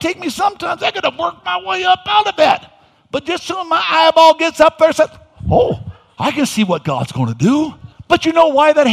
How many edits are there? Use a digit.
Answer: 1